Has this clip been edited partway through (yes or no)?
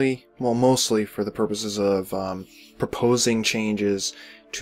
no